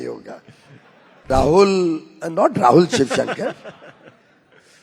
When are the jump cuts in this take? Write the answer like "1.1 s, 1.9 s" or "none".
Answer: 1.2 s